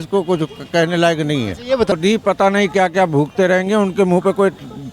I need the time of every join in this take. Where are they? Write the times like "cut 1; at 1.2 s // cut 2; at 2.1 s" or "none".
cut 1; at 1.9 s